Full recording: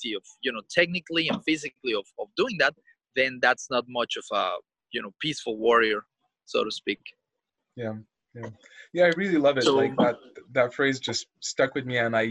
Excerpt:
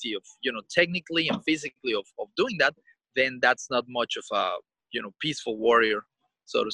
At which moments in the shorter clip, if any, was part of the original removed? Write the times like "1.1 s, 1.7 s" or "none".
none